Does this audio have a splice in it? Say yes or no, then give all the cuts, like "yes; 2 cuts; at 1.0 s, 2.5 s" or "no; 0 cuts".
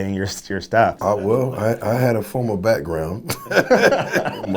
yes; 1 cut; at 1.0 s